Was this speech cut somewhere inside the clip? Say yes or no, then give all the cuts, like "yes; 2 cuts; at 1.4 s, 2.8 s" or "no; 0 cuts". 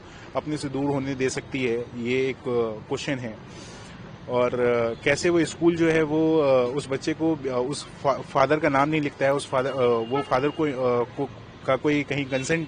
no; 0 cuts